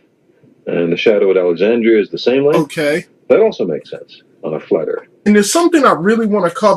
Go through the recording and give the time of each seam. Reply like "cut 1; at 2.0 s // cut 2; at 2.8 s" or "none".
none